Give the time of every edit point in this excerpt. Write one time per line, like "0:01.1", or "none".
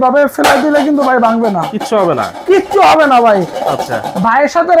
none